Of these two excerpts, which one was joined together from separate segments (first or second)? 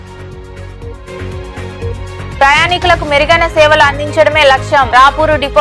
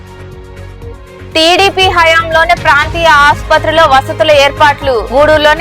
second